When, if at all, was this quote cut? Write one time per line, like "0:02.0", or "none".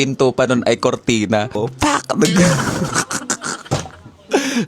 0:01.7